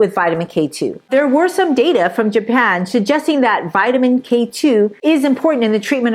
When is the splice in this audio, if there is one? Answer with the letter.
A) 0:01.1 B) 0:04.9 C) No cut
A